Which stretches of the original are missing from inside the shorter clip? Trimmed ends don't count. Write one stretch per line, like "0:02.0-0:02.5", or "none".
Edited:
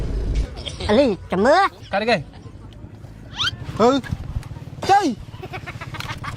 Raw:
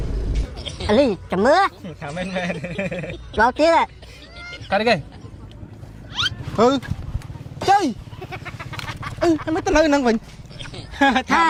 0:01.8-0:04.6

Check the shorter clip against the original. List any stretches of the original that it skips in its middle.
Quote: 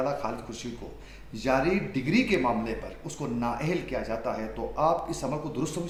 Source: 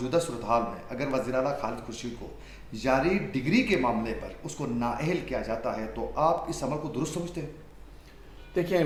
none

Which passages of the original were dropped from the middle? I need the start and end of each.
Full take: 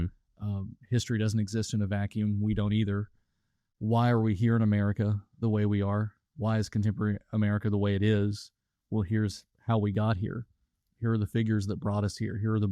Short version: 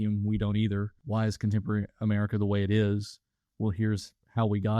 0:03.1-0:06.3

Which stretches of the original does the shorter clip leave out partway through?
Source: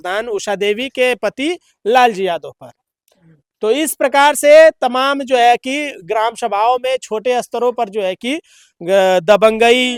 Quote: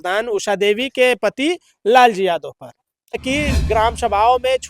0:03.2-0:05.6

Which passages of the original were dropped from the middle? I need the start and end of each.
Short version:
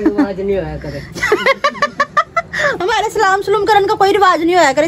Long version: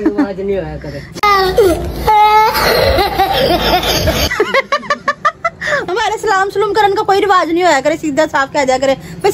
0:01.2-0:04.2

